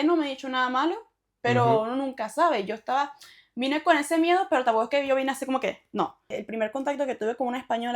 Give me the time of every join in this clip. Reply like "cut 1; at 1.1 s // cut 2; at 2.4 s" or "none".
cut 1; at 6.4 s